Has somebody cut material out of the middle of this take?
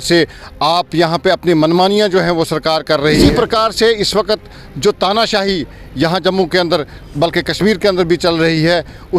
yes; 1 cut; at 3.2 s

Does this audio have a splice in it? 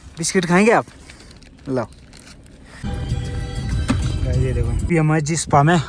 yes; 2 cuts; at 2.7 s, 4.7 s

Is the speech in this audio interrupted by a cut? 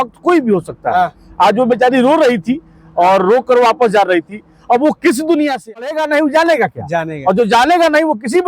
yes; 1 cut; at 5.9 s

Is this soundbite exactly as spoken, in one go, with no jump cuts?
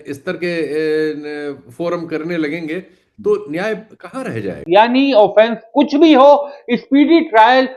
no; 1 cut; at 4.6 s

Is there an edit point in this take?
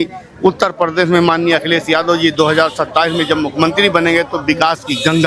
no; 0 cuts

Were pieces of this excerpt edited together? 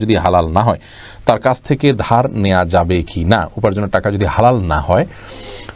no; 0 cuts

